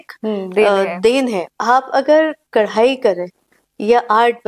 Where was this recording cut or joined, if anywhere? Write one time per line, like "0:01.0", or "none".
0:01.5